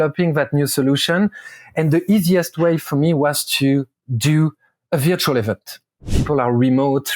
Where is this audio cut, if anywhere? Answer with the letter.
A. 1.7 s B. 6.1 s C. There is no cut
B